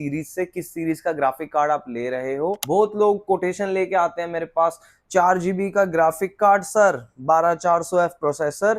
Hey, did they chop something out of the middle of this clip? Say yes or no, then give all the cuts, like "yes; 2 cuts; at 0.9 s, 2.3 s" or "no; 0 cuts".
yes; 1 cut; at 2.6 s